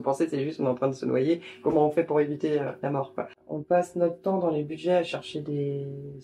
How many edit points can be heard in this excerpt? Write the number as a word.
one